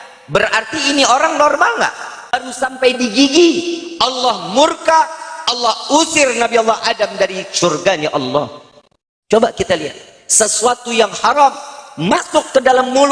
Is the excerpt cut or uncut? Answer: cut